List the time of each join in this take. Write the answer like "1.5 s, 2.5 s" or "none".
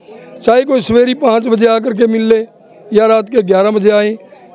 none